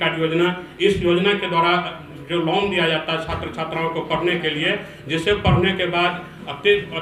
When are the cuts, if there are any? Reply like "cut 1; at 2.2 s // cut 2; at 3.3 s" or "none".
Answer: none